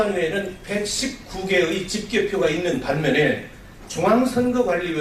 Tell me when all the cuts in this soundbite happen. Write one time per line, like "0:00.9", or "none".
0:03.4